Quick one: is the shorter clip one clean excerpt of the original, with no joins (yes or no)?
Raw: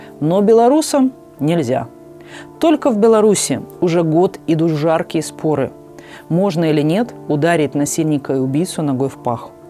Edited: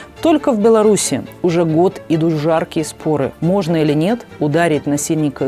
no